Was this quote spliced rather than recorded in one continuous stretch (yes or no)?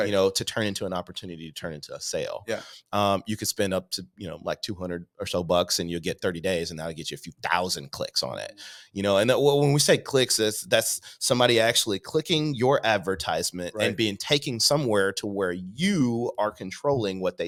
no